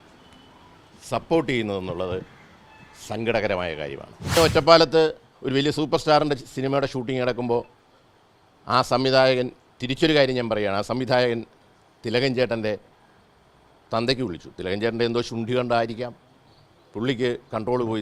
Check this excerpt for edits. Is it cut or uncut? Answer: cut